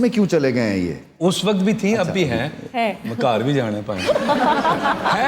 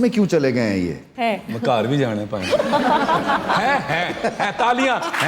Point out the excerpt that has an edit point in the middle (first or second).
second